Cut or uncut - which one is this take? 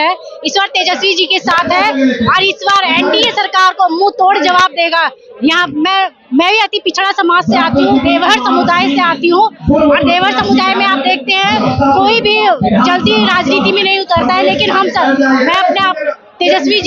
uncut